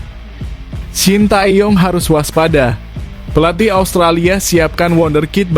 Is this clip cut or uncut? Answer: cut